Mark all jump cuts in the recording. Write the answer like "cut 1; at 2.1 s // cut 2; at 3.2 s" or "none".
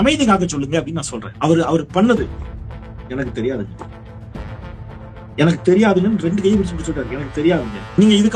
none